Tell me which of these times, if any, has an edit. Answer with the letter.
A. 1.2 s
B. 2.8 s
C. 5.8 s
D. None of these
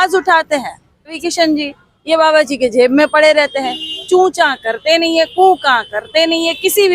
A